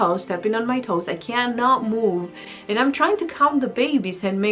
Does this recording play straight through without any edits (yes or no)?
yes